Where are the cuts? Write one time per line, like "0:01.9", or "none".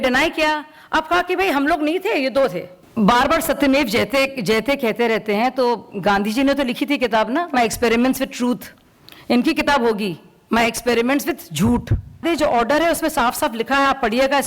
0:02.8
0:12.2